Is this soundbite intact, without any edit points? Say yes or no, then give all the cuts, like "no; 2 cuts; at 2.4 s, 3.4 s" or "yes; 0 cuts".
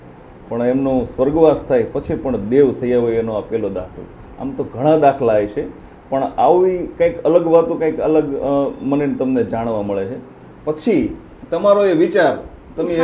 yes; 0 cuts